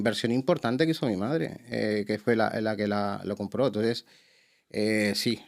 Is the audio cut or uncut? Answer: uncut